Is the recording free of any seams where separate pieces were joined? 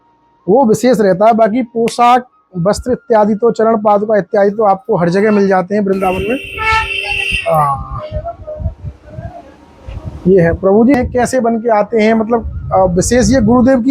no; 1 cut; at 11.0 s

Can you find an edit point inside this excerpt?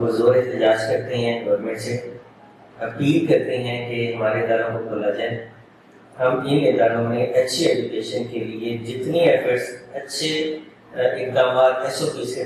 no; 0 cuts

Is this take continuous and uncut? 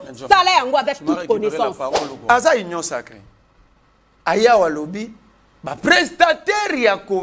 no; 1 cut; at 2.1 s

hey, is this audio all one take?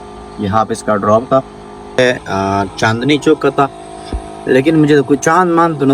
no; 1 cut; at 2.0 s

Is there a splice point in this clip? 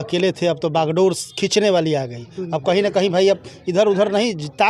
no; 0 cuts

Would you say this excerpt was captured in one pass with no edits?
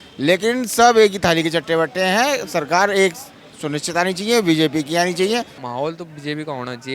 no; 1 cut; at 5.6 s

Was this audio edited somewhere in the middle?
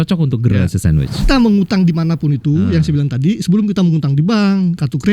yes; 1 cut; at 1.3 s

